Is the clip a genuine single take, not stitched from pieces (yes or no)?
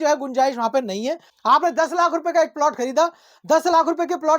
no